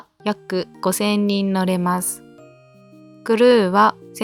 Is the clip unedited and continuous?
yes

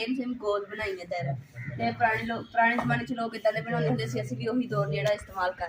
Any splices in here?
no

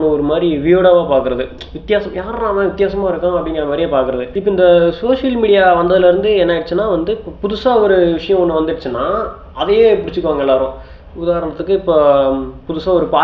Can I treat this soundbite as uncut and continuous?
yes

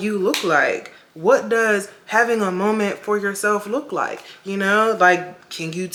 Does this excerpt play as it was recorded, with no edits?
yes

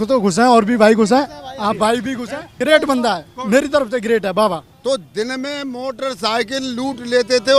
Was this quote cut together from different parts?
yes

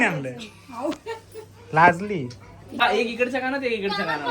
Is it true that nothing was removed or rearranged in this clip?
no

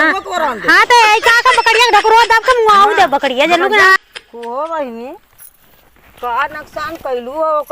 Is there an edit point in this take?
yes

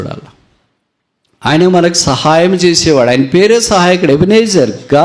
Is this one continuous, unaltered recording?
yes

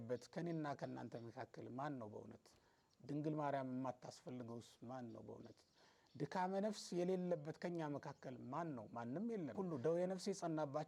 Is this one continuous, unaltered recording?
no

